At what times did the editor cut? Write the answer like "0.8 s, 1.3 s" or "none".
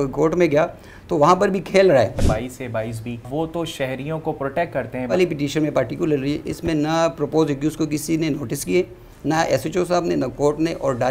2.2 s, 3.3 s, 5.1 s